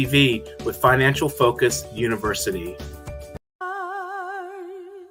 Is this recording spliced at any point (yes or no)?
no